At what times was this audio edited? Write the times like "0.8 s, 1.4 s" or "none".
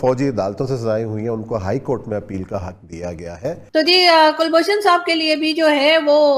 3.6 s